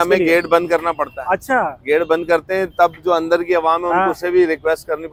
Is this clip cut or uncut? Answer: uncut